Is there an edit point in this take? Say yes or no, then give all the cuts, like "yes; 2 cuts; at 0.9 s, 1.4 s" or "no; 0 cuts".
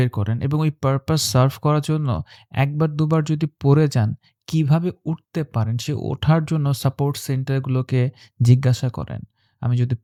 no; 0 cuts